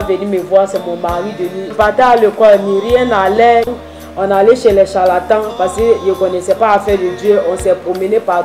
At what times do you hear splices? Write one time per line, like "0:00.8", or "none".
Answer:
0:01.7
0:03.7